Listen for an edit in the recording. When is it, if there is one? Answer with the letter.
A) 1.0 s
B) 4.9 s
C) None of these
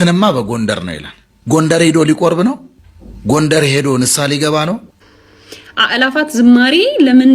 B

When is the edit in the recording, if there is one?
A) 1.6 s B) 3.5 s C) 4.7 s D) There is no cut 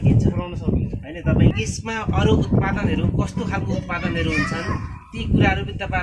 A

